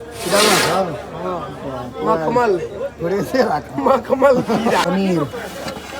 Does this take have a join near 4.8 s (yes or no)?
yes